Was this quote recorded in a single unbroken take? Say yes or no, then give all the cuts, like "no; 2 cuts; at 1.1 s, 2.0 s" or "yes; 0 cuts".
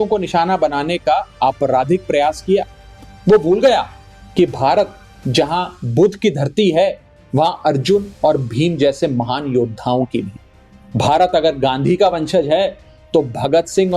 yes; 0 cuts